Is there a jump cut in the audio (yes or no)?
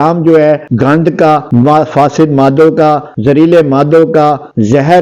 no